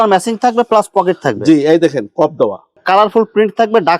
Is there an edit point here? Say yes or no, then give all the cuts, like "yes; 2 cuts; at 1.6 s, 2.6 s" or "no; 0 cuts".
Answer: yes; 1 cut; at 2.7 s